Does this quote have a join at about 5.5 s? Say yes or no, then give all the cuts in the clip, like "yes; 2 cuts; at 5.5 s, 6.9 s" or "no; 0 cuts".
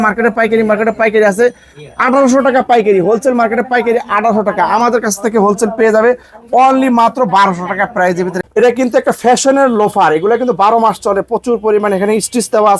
no; 1 cut; at 8.4 s